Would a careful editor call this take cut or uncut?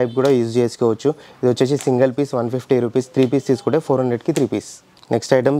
uncut